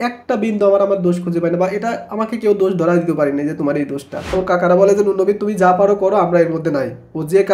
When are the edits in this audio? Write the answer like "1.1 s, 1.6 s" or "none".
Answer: 4.3 s